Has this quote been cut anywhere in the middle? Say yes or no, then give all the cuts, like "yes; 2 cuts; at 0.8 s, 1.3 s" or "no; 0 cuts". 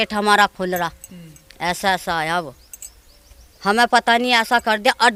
no; 0 cuts